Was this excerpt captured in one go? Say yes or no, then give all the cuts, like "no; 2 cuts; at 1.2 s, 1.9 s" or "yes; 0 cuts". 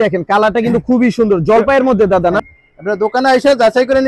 no; 1 cut; at 2.5 s